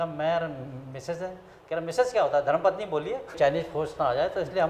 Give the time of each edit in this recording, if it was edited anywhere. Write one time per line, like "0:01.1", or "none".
0:03.3